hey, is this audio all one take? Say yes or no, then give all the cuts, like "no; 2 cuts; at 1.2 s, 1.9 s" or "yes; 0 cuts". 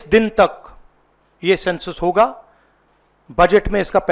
yes; 0 cuts